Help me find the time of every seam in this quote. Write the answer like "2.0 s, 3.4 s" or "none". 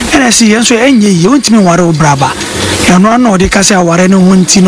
none